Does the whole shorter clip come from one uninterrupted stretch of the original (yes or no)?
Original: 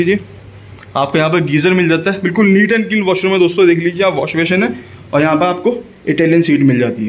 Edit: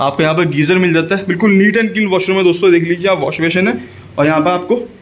yes